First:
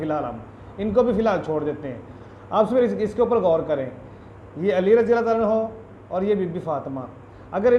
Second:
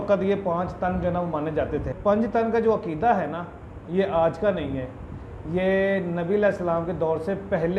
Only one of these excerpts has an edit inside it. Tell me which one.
second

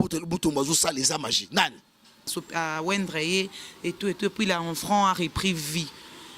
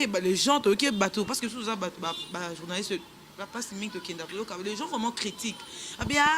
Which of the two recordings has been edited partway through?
first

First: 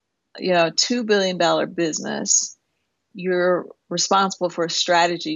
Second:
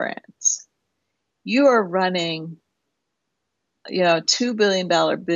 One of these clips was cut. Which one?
first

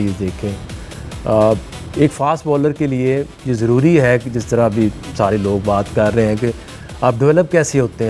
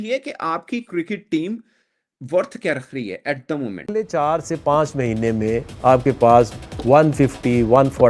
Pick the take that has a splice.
second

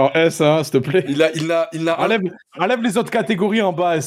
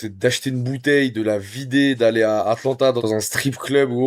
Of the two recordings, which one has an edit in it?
second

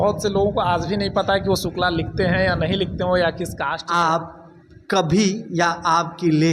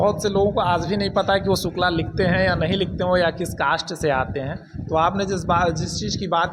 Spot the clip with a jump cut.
first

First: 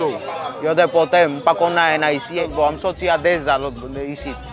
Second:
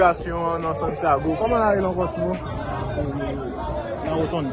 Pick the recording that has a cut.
first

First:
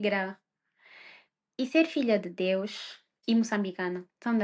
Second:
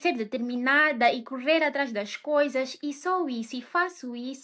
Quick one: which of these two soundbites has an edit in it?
first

